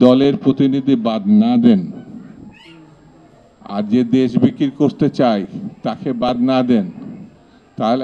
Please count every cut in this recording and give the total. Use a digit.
0